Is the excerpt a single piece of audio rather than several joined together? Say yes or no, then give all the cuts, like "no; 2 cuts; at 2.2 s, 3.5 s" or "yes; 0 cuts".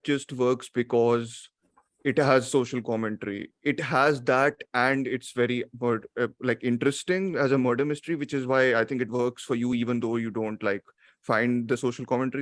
yes; 0 cuts